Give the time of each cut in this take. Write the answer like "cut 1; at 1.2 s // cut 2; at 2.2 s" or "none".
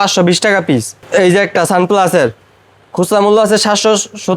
cut 1; at 0.9 s